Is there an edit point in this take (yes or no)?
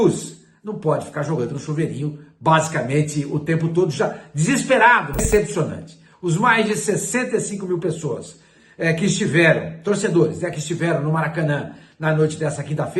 yes